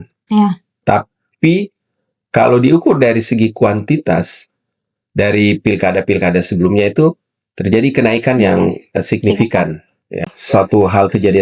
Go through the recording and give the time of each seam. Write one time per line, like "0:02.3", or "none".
0:10.4